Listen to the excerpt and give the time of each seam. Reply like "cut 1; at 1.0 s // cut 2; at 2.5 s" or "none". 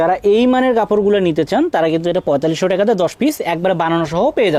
none